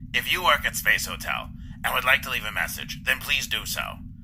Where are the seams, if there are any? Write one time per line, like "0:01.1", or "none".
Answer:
none